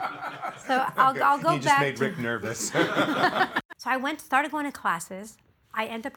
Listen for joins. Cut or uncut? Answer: cut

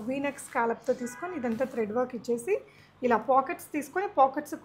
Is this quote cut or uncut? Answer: uncut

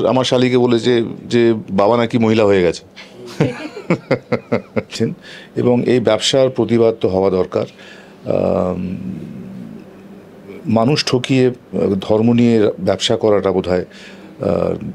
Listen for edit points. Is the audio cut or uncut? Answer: cut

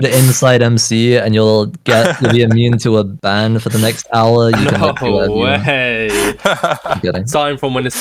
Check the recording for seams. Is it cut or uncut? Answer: uncut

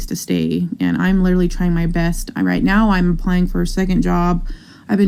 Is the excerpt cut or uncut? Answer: uncut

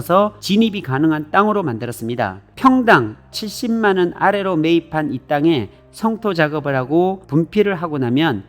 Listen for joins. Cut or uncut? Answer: cut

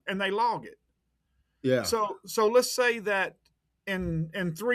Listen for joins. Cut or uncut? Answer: uncut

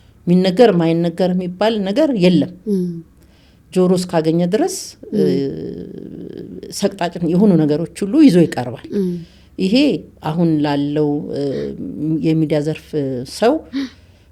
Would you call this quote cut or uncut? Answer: uncut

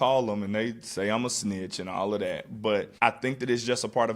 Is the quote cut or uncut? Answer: cut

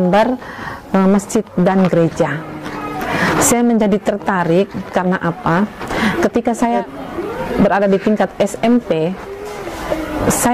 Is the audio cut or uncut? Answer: cut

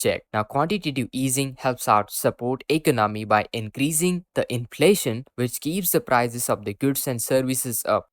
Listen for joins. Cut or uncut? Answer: uncut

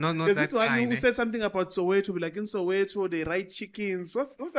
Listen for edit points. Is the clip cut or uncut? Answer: uncut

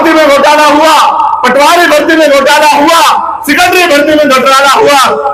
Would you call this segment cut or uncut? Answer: uncut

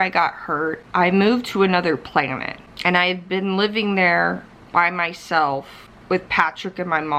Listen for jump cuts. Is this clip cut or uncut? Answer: uncut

